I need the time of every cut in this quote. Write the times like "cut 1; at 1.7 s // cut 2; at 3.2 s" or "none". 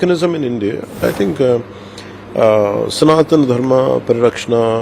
cut 1; at 1.0 s